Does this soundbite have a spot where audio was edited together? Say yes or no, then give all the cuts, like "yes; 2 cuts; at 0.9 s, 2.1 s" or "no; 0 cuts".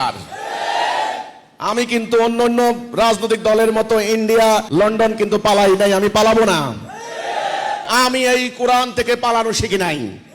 yes; 2 cuts; at 4.7 s, 7.8 s